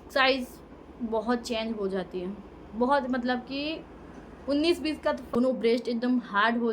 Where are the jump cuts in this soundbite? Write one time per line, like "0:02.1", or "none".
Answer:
0:05.3